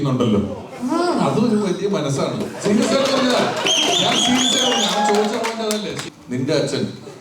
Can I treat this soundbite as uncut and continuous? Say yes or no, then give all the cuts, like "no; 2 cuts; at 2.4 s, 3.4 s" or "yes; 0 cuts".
no; 1 cut; at 6.1 s